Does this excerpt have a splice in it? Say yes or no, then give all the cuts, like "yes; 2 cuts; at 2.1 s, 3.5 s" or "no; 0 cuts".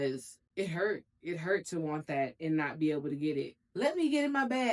yes; 1 cut; at 3.6 s